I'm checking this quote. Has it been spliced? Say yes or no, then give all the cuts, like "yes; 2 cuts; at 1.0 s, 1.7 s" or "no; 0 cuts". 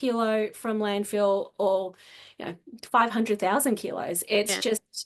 no; 0 cuts